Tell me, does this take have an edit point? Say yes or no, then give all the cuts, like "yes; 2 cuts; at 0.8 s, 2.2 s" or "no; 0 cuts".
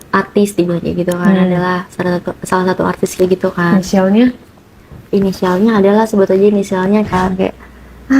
yes; 1 cut; at 7.1 s